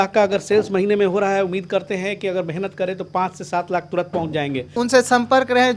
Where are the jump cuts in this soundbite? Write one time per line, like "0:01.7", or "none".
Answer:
0:04.8